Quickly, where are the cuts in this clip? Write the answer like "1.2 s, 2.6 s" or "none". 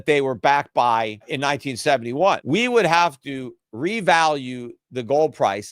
1.3 s, 2.4 s